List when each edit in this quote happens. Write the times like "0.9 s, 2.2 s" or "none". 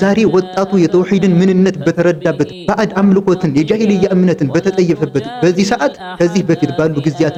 none